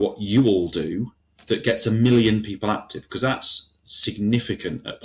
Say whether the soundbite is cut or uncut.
uncut